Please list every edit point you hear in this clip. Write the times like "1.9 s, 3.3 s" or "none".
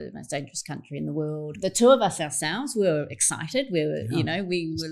1.5 s